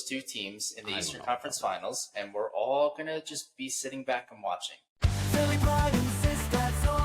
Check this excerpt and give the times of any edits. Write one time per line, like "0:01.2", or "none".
0:05.0